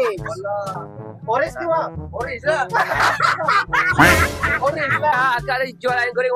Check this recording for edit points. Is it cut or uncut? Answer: cut